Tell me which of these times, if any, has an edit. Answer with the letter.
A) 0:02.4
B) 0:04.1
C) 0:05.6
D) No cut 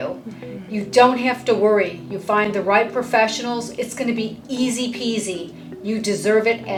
D